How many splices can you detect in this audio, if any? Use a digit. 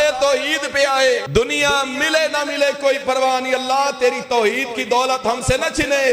1